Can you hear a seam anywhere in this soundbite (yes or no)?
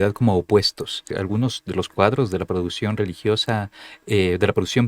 yes